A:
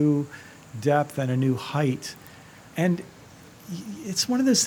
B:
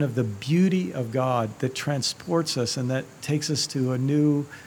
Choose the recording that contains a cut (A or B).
A